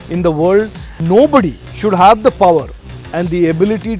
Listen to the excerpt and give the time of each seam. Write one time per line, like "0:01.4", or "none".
0:01.0
0:01.6